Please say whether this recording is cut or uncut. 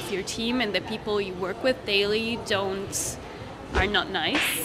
uncut